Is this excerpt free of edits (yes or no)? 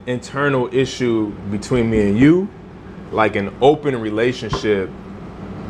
yes